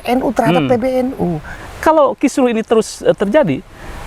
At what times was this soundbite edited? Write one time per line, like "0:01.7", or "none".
0:01.6